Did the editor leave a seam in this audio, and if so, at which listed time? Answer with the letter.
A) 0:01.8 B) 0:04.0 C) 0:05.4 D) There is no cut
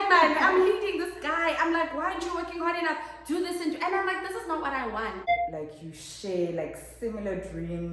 C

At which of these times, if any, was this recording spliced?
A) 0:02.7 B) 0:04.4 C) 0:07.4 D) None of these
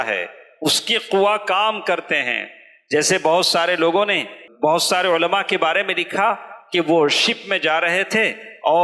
B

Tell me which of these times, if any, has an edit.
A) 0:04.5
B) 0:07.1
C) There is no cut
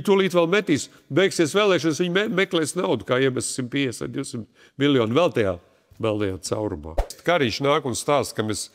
B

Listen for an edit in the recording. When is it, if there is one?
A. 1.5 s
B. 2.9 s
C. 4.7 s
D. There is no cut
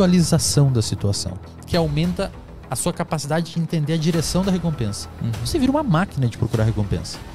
A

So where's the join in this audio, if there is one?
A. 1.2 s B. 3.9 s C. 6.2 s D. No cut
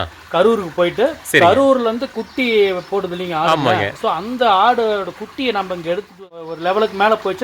C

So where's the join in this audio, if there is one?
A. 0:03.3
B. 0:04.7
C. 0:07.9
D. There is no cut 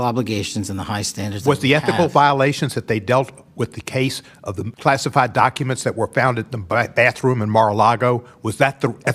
B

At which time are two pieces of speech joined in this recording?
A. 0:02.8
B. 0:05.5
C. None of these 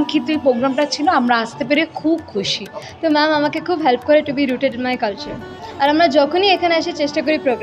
A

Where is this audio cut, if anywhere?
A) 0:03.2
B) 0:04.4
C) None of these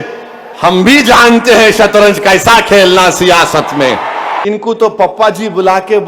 B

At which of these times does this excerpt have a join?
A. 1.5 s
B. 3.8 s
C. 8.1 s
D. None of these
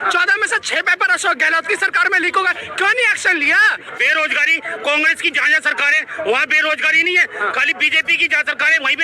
B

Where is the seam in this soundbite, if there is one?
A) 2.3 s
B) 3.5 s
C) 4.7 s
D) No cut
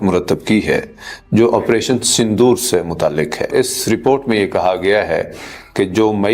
B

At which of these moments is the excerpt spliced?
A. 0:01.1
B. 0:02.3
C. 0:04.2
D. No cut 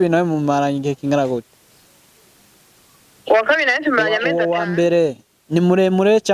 C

